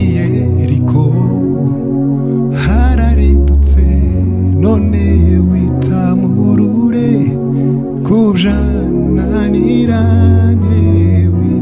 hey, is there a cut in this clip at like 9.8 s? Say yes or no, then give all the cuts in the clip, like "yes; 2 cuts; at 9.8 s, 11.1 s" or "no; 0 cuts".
no; 0 cuts